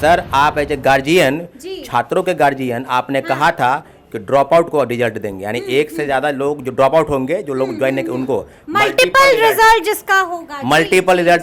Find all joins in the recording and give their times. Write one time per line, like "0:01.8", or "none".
none